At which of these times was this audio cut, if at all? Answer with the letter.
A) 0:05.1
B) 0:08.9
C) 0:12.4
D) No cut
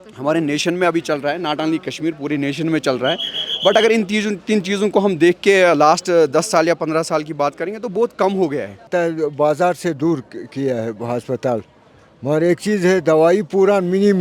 B